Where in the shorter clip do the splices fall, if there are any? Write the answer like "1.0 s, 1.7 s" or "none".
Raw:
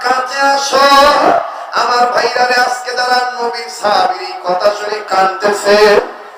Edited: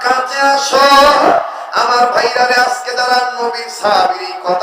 none